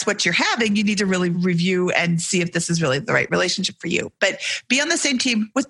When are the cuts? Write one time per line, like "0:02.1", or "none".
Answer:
none